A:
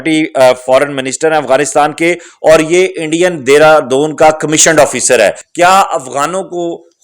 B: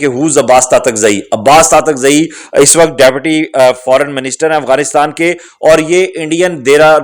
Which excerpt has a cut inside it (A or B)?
A